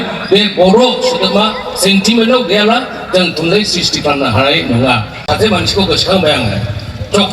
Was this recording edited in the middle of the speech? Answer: yes; 1 cut; at 5.2 s

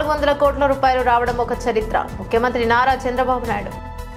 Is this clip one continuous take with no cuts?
yes; 0 cuts

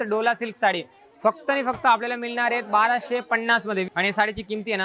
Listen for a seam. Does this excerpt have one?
yes; 1 cut; at 3.9 s

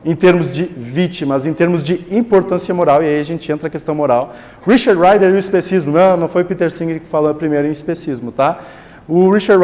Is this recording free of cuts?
yes; 0 cuts

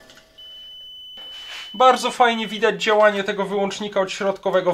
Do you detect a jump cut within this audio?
yes; 1 cut; at 1.2 s

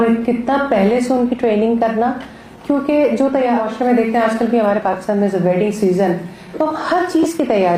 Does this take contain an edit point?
no; 0 cuts

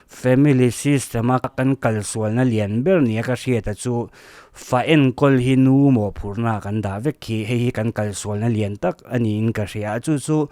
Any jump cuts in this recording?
yes; 1 cut; at 1.5 s

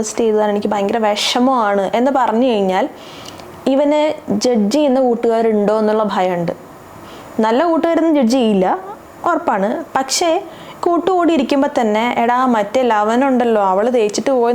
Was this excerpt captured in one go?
yes; 0 cuts

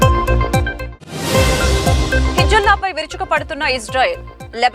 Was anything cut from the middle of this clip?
no; 0 cuts

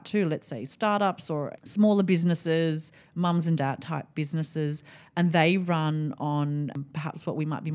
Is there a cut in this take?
yes; 2 cuts; at 1.6 s, 6.8 s

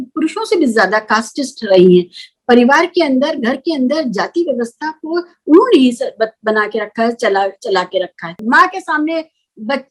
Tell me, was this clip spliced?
yes; 1 cut; at 8.3 s

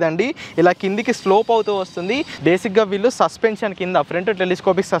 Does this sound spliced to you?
yes; 1 cut; at 2.3 s

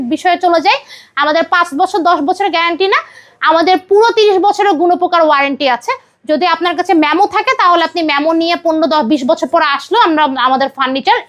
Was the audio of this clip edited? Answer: no; 0 cuts

